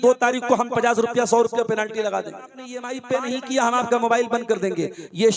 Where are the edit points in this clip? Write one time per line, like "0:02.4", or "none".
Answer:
0:02.9